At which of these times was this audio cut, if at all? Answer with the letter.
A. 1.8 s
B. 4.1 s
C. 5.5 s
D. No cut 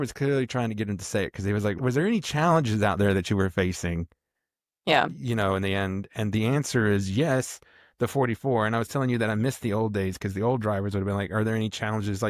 A